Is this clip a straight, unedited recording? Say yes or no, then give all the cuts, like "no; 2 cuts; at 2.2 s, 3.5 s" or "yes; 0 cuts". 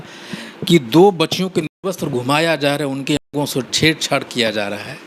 yes; 0 cuts